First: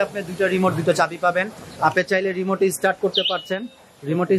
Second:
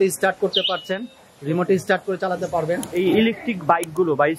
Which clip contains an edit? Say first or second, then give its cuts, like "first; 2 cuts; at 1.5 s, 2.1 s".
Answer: second; 1 cut; at 3.0 s